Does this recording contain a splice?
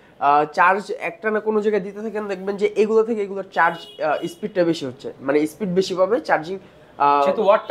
no; 0 cuts

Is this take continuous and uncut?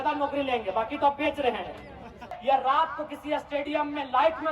no; 1 cut; at 2.3 s

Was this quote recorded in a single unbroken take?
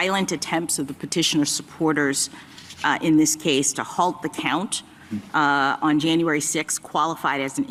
yes; 0 cuts

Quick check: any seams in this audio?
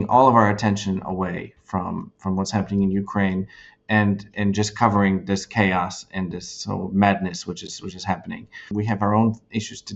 yes; 1 cut; at 8.7 s

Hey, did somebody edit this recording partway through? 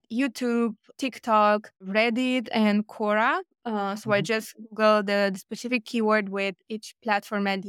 no; 0 cuts

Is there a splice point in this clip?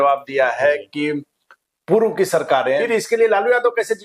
yes; 1 cut; at 2.9 s

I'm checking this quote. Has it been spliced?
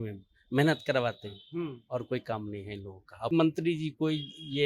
yes; 1 cut; at 3.3 s

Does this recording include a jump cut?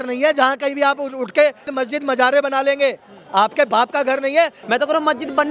yes; 1 cut; at 4.6 s

